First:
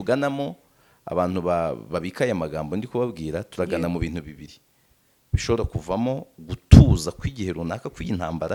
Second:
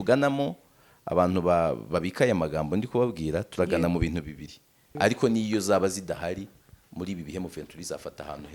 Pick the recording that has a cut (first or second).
second